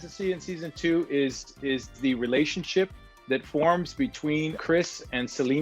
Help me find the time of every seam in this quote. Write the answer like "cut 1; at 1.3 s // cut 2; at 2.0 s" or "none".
cut 1; at 4.6 s